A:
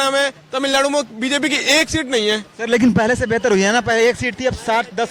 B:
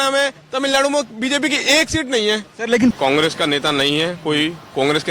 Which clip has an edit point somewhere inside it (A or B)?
B